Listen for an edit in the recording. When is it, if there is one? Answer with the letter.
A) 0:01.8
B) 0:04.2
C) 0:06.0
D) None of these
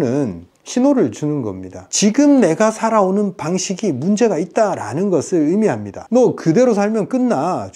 A